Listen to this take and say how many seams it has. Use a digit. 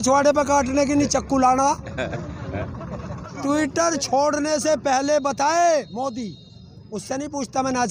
1